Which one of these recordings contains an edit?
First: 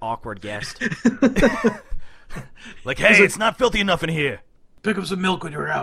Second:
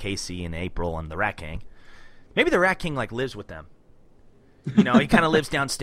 first; 1 cut; at 4.7 s

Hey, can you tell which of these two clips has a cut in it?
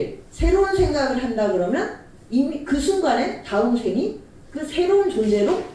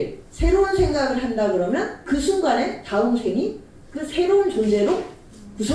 second; 1 cut; at 2.0 s

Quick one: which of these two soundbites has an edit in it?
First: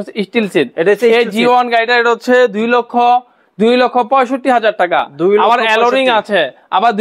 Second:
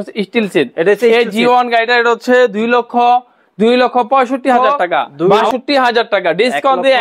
second; 1 cut; at 5.2 s

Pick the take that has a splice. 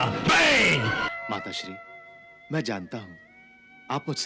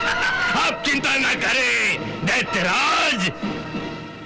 first; 1 cut; at 1.1 s

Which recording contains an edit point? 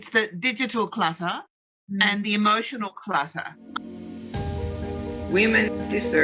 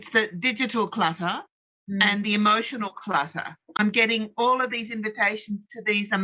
first; 1 cut; at 3.6 s

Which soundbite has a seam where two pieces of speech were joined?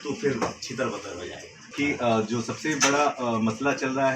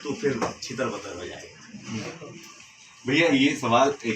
first; 1 cut; at 1.7 s

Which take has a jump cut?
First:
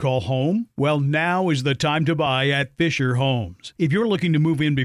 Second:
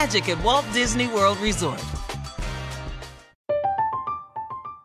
second; 1 cut; at 3.3 s

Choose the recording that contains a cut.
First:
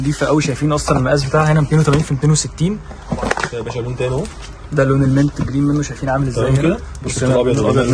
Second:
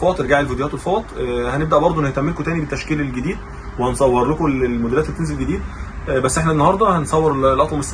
first; 2 cuts; at 3.0 s, 7.0 s

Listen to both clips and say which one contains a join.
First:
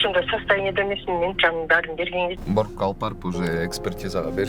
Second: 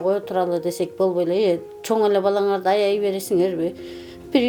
first; 1 cut; at 2.4 s

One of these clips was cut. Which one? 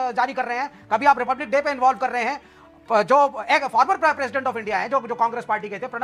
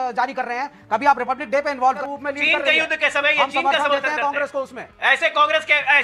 second; 1 cut; at 2.0 s

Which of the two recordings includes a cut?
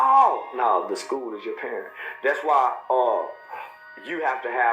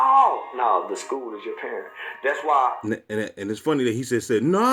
first; 1 cut; at 2.8 s

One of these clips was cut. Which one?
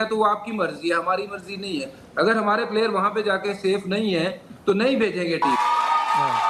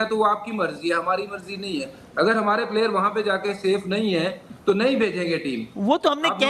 first; 1 cut; at 5.4 s

